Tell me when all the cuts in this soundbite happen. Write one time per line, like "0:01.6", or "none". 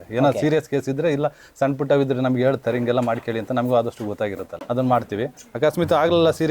0:04.5